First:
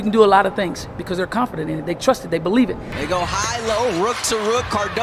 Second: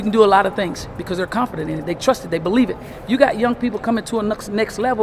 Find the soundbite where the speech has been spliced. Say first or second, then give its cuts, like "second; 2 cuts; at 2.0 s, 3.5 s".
first; 1 cut; at 2.9 s